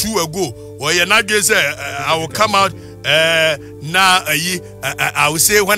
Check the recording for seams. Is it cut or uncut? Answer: uncut